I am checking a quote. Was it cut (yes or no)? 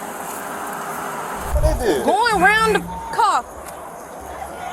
yes